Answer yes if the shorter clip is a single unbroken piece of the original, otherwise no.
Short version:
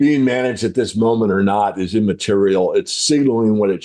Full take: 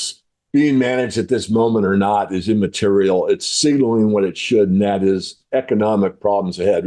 yes